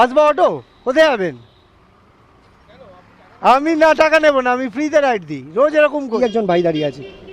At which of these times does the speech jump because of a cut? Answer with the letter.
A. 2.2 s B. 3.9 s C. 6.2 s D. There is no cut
C